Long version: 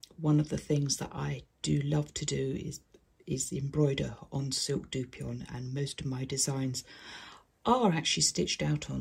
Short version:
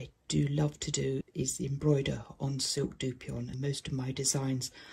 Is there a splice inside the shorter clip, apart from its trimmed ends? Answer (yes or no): yes